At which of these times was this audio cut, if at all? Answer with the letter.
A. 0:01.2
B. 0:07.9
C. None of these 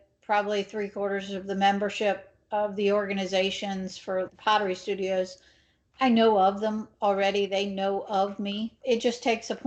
C